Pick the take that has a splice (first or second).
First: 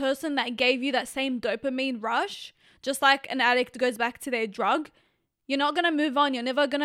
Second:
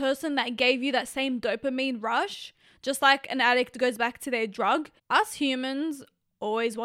second